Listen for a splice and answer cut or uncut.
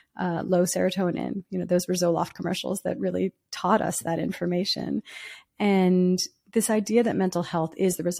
uncut